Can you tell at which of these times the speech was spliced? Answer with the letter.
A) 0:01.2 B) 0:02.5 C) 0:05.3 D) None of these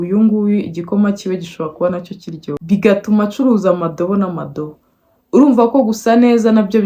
D